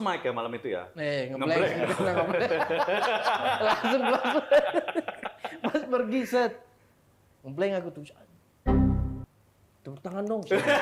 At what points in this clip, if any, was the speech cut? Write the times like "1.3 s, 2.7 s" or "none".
none